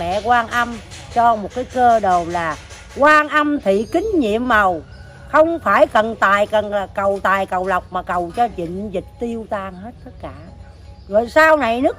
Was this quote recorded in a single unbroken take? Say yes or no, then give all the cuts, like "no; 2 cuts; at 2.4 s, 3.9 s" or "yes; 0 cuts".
yes; 0 cuts